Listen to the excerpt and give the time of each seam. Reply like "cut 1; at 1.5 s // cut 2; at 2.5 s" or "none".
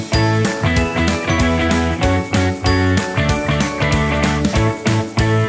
none

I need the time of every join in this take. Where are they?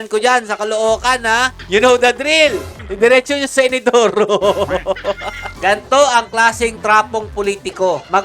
cut 1; at 2.9 s // cut 2; at 5.5 s

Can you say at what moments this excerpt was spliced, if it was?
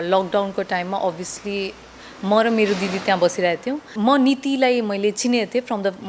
cut 1; at 3.9 s

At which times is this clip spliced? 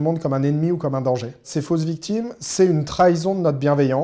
cut 1; at 1.5 s

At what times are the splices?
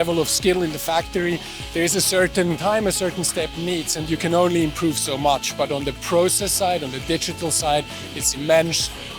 cut 1; at 2.6 s

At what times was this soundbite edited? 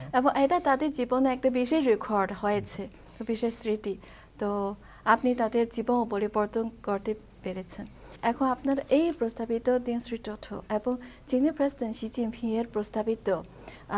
cut 1; at 8.1 s

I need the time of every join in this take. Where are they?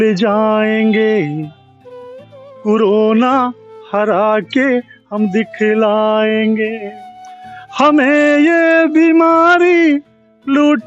none

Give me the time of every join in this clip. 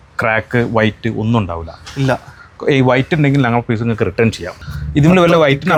none

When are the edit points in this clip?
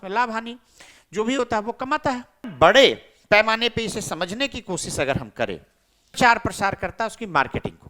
cut 1; at 2.5 s // cut 2; at 6.2 s

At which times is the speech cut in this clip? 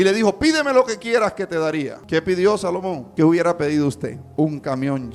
cut 1; at 2.0 s // cut 2; at 3.0 s // cut 3; at 4.2 s

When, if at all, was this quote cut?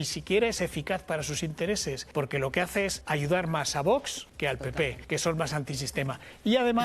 cut 1; at 2.0 s // cut 2; at 3.0 s // cut 3; at 4.7 s

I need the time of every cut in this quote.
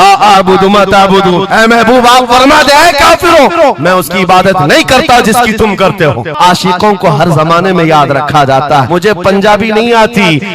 cut 1; at 6.3 s // cut 2; at 8.9 s

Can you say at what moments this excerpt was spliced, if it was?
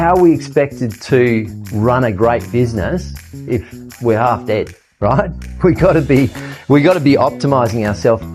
none

